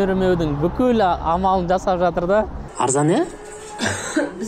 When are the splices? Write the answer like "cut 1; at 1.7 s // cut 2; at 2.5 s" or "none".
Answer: cut 1; at 2.6 s